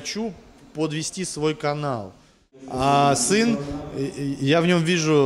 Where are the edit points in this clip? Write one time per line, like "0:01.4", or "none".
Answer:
0:02.6